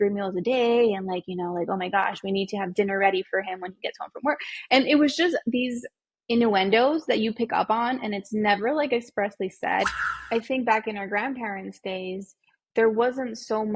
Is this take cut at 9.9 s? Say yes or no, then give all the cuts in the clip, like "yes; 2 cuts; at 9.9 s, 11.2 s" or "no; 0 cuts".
yes; 1 cut; at 9.9 s